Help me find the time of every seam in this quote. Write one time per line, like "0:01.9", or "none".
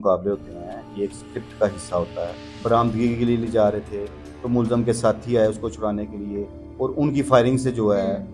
0:02.4